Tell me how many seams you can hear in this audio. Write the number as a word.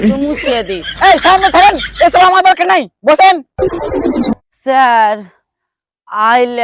one